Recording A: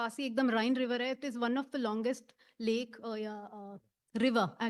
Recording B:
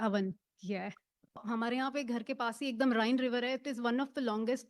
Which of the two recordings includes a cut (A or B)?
B